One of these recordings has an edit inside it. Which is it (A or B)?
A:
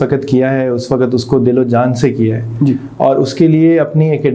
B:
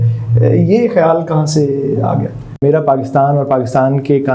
B